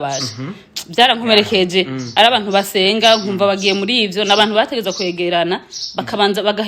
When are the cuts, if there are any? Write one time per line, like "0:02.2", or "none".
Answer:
none